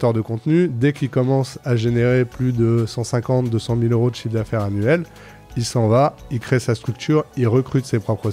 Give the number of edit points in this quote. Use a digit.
0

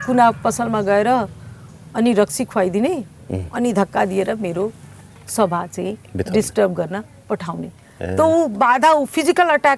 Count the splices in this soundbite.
0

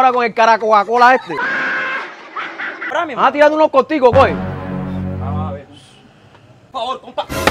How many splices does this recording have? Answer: 1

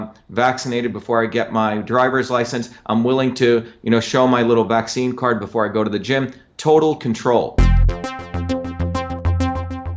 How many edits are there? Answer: 1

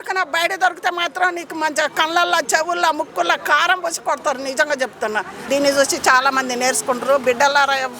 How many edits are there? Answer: 1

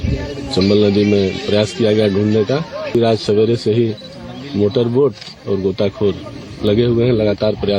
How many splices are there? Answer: 1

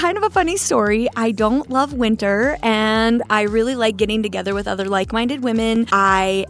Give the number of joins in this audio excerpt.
0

